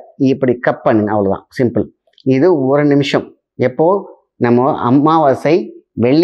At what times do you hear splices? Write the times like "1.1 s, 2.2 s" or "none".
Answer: none